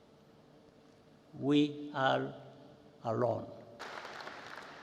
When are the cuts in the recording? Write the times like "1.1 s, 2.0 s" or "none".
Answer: 3.8 s